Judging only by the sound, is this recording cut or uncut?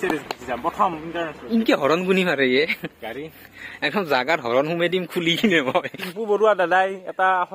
cut